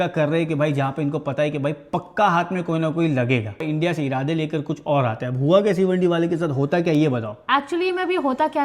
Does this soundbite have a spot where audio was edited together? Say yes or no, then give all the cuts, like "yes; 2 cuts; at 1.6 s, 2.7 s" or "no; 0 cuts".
no; 0 cuts